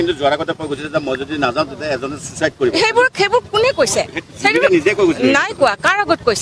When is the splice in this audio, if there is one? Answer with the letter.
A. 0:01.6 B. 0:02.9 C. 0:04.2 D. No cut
D